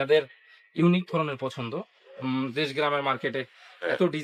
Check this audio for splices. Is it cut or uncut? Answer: uncut